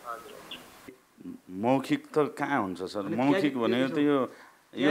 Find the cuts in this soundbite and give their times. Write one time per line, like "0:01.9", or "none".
0:01.0